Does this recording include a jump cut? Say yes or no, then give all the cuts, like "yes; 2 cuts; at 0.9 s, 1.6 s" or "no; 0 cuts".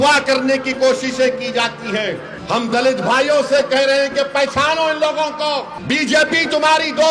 yes; 2 cuts; at 2.3 s, 5.7 s